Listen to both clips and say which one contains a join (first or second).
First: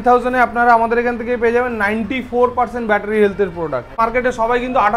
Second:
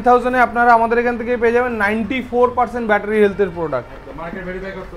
first